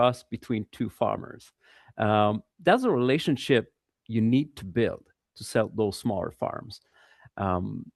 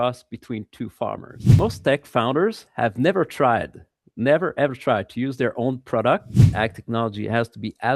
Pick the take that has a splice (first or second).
second